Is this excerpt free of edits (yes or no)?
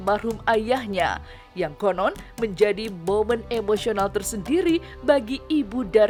yes